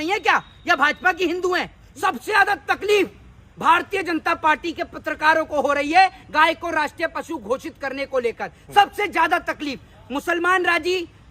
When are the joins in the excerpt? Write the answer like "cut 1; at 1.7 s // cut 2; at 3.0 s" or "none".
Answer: cut 1; at 1.8 s